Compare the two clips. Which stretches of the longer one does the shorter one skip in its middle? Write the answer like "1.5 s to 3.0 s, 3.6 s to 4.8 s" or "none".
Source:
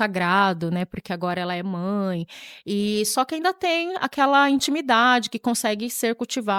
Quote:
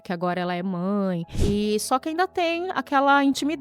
2.3 s to 2.6 s